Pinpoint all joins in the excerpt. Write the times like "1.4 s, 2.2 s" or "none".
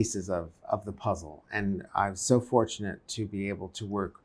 none